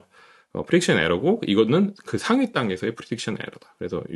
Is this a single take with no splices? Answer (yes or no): yes